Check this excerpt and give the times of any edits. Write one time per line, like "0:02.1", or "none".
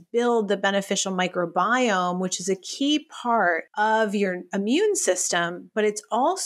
0:03.7